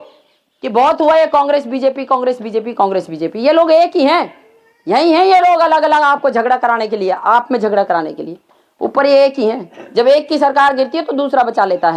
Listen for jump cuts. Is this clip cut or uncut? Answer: uncut